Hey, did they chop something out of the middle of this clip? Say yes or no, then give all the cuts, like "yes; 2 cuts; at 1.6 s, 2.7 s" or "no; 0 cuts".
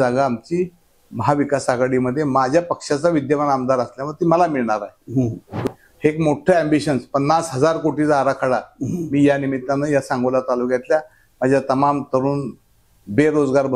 yes; 1 cut; at 5.5 s